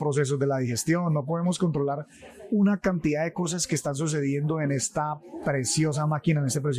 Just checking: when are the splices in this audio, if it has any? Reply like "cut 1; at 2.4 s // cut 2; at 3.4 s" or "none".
none